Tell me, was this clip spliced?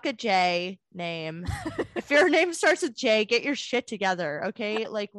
no; 0 cuts

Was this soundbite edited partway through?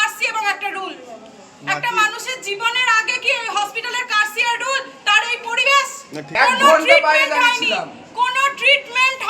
yes; 1 cut; at 6.4 s

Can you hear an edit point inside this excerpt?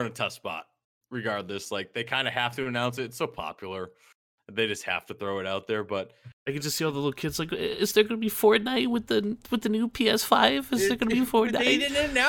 no; 0 cuts

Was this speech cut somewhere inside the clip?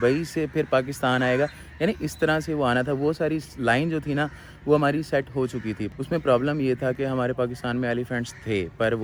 no; 0 cuts

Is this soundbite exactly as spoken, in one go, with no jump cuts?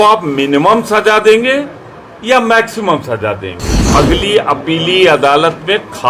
no; 1 cut; at 3.8 s

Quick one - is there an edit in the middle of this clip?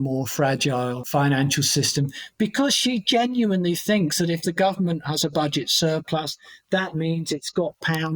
yes; 1 cut; at 1.0 s

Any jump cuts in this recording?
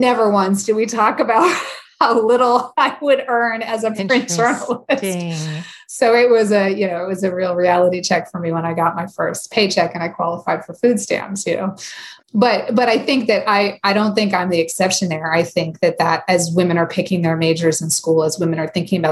yes; 1 cut; at 12.1 s

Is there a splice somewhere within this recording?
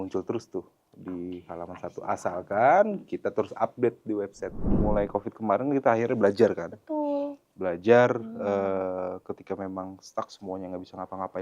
yes; 1 cut; at 4.8 s

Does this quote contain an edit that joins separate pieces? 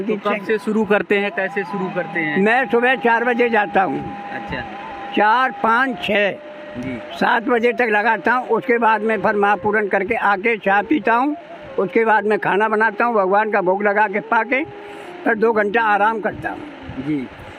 no; 0 cuts

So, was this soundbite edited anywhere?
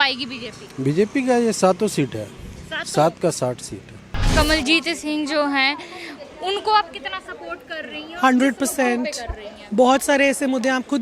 yes; 1 cut; at 4.3 s

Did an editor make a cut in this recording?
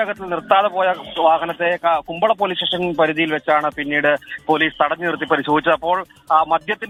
no; 0 cuts

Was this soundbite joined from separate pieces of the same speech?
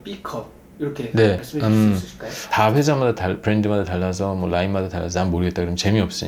yes; 2 cuts; at 1.4 s, 2.4 s

